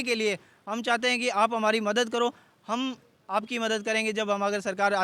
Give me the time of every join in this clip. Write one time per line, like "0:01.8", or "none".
none